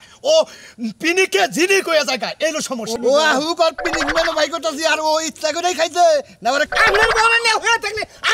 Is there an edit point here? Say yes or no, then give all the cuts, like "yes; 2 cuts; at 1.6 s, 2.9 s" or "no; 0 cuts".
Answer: yes; 1 cut; at 6.7 s